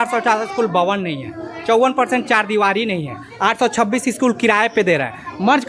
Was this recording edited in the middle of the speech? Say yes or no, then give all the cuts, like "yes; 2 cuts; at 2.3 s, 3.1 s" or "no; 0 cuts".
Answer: no; 0 cuts